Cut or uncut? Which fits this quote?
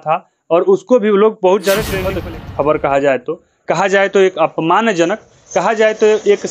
cut